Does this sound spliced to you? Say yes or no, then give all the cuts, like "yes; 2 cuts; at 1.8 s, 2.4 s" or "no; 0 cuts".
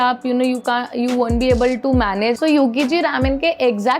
yes; 1 cut; at 2.4 s